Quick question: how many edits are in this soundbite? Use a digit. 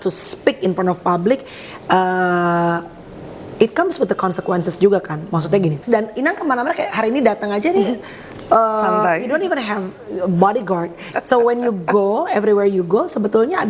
2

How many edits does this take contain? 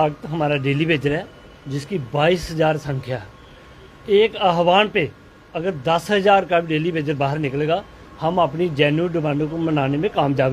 1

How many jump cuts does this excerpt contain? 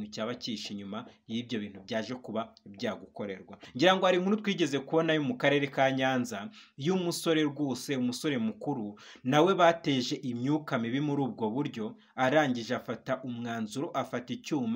1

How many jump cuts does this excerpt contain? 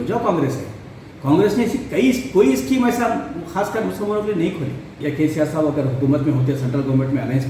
1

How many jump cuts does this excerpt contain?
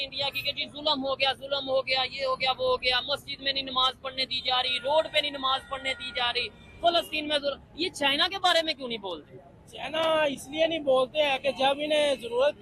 0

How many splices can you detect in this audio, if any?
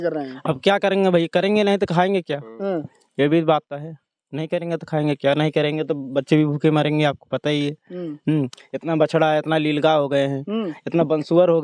0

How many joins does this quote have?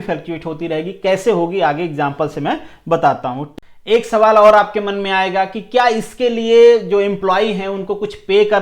1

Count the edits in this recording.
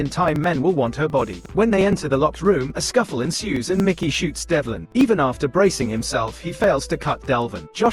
2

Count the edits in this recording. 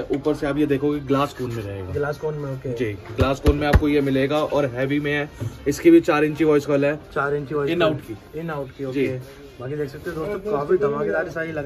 0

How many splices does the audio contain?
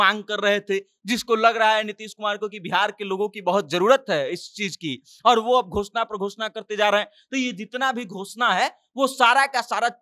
0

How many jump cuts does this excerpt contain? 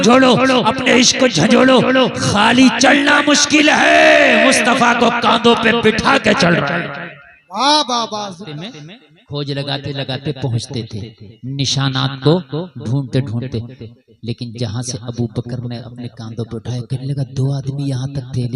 1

